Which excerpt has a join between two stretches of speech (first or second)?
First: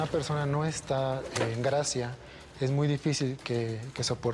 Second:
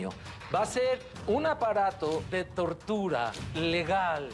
second